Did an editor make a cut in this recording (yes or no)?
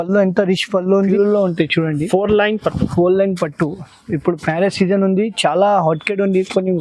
yes